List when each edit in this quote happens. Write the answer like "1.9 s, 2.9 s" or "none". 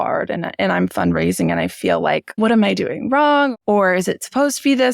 2.3 s, 3.5 s